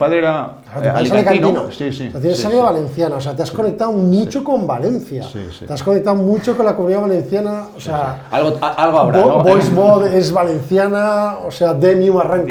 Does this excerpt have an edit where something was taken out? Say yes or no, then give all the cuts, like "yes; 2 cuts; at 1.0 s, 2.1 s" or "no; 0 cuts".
no; 0 cuts